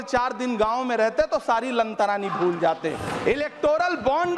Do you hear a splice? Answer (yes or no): yes